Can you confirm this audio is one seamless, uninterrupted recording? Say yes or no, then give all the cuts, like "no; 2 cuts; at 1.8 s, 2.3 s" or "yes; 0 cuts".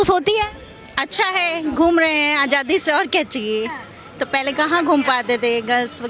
yes; 0 cuts